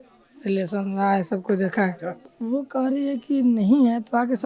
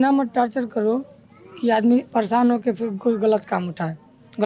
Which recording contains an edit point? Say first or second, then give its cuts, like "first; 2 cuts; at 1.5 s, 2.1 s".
first; 1 cut; at 2.3 s